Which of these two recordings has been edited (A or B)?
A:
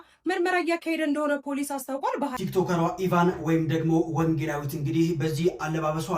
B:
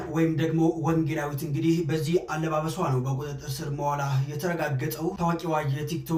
A